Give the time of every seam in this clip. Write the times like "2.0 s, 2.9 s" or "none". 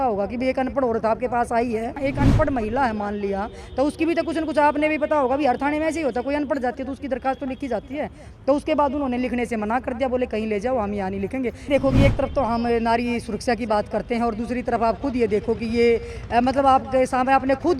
2.0 s, 11.7 s